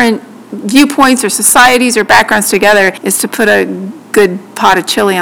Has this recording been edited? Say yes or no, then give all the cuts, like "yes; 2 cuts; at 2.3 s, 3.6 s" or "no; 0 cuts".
yes; 1 cut; at 3.0 s